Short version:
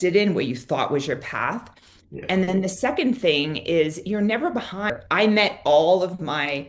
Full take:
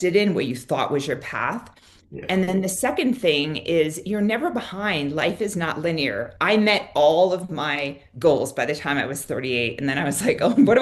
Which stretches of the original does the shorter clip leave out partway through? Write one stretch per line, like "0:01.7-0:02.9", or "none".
0:04.9-0:06.2